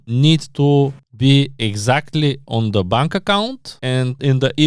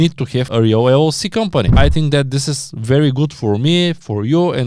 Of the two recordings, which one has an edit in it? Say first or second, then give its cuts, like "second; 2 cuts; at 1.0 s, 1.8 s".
second; 1 cut; at 1.7 s